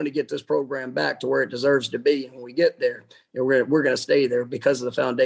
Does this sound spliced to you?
no; 0 cuts

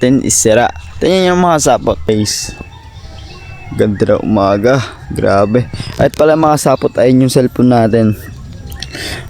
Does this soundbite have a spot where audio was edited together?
yes; 1 cut; at 2.1 s

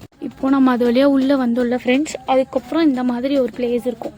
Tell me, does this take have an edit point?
no; 0 cuts

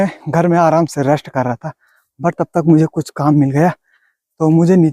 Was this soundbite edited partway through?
no; 0 cuts

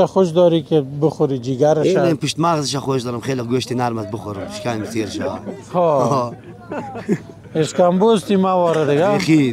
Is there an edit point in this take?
no; 0 cuts

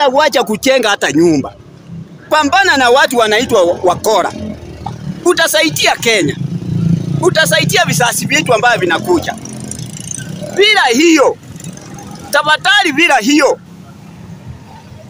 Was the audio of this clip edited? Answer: no; 0 cuts

